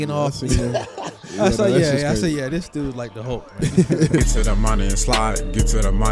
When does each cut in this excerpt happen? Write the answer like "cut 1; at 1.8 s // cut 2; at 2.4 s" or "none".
cut 1; at 4.2 s